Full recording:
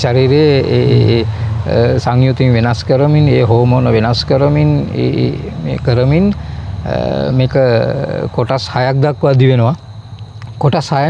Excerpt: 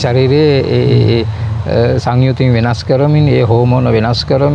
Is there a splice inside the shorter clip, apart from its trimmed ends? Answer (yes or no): no